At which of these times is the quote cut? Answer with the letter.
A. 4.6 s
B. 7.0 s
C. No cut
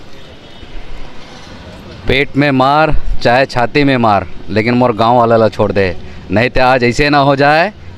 C